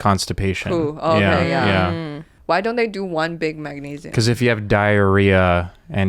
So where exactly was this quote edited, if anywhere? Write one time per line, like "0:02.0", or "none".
0:02.3